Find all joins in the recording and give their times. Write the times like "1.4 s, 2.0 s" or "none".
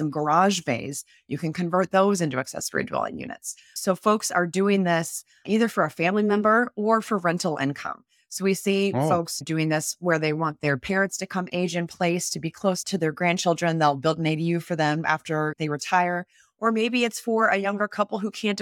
12.8 s